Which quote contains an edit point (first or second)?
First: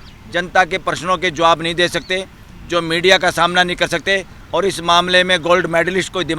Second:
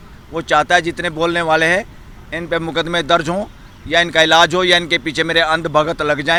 first